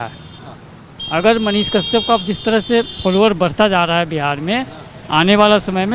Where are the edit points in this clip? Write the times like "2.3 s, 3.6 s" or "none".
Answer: none